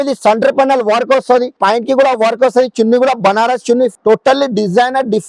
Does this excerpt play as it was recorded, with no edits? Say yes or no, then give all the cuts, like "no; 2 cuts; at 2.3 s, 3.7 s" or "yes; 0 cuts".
no; 2 cuts; at 1.5 s, 3.9 s